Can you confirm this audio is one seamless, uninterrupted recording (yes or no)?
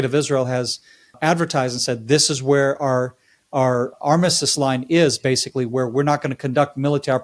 no